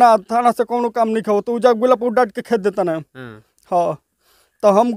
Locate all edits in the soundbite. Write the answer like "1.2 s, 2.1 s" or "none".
none